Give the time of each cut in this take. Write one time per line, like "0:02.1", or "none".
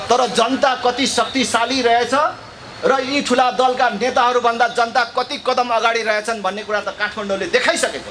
none